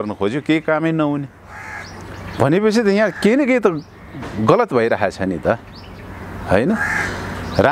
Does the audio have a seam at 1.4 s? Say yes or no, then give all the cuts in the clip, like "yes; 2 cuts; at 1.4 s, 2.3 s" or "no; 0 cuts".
no; 0 cuts